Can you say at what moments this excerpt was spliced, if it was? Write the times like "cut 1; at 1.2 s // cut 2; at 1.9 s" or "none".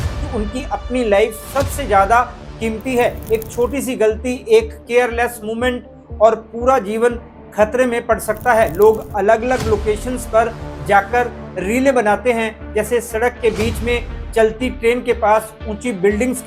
none

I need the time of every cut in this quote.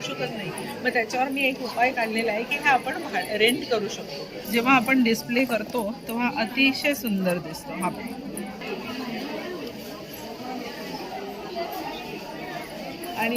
cut 1; at 4.4 s // cut 2; at 8.7 s

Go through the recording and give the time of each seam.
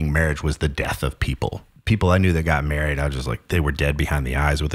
cut 1; at 1.7 s

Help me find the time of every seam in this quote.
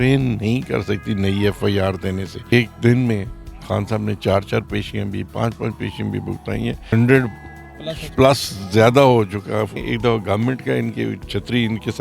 cut 1; at 2.5 s // cut 2; at 6.9 s // cut 3; at 9.8 s

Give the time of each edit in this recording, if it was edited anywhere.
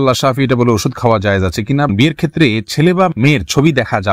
cut 1; at 1.9 s

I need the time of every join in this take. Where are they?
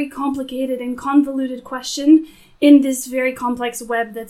none

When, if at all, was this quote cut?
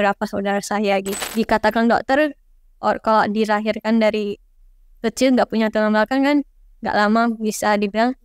cut 1; at 1.2 s

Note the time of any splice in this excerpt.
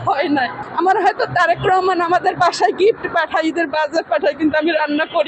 none

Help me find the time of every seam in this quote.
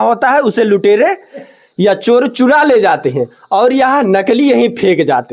none

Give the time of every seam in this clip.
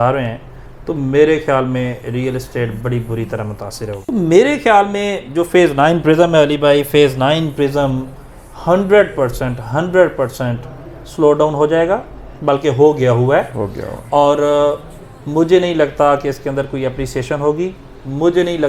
cut 1; at 4.0 s

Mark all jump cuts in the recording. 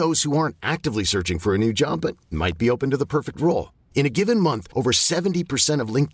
none

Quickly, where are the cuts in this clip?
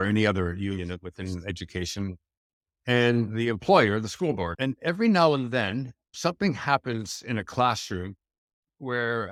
none

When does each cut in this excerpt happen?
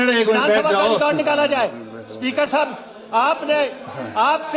none

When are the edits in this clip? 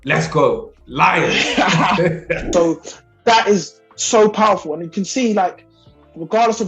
cut 1; at 2.4 s

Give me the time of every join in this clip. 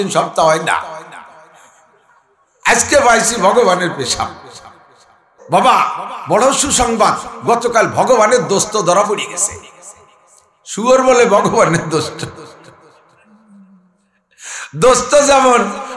cut 1; at 5.4 s

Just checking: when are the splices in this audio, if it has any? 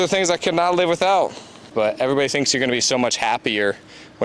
cut 1; at 1.7 s

